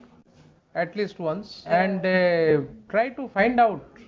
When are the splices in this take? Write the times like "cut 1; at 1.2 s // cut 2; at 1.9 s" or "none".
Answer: cut 1; at 1.6 s